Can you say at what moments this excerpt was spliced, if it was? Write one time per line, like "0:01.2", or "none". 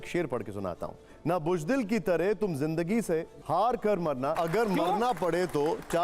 0:01.1
0:03.4
0:04.3